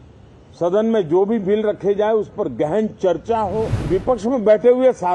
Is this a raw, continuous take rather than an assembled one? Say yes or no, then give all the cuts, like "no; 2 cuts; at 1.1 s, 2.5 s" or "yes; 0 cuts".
no; 1 cut; at 3.8 s